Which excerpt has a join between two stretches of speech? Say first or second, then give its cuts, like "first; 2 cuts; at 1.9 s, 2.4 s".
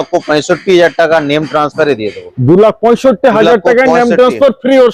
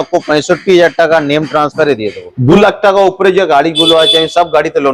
second; 1 cut; at 2.6 s